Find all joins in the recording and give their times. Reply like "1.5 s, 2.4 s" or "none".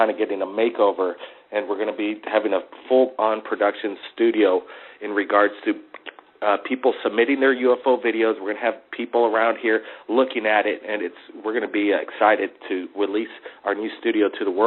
8.9 s